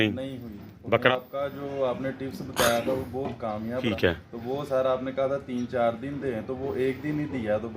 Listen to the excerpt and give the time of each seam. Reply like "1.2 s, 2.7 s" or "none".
1.1 s, 3.9 s